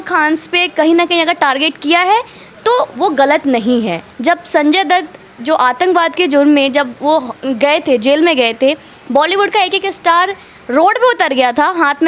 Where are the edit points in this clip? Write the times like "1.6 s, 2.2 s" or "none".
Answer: 4.0 s

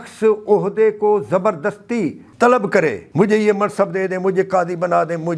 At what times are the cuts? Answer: 2.2 s, 3.0 s

